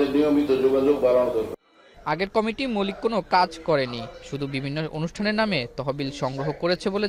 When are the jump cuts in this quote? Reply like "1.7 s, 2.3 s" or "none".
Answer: none